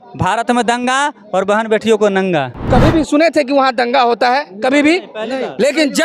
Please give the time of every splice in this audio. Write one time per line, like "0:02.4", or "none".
0:02.6